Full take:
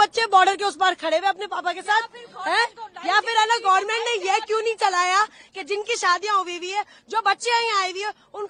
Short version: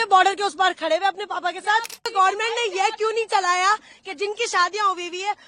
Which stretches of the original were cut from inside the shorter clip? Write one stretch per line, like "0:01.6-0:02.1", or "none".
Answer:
0:02.3-0:03.6